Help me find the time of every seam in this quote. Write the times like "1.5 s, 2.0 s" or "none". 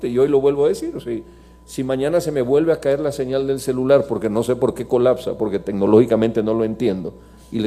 none